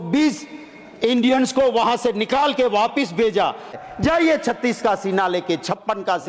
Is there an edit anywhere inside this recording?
yes; 1 cut; at 3.8 s

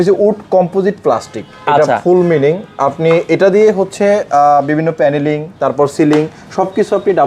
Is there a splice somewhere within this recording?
no; 0 cuts

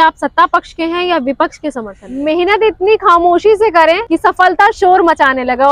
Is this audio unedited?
no; 2 cuts; at 2.0 s, 4.1 s

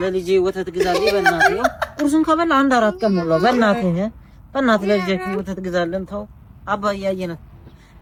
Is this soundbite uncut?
yes; 0 cuts

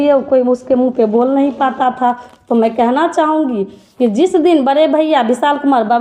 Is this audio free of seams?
yes; 0 cuts

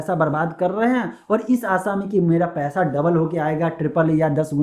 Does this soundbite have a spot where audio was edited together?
no; 0 cuts

